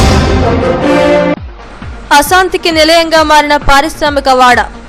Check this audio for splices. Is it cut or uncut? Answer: uncut